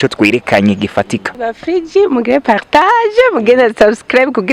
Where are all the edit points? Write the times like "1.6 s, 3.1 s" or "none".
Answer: 1.3 s